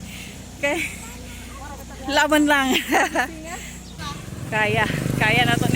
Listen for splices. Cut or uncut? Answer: cut